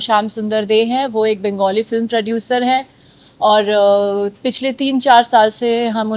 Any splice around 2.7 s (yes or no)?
no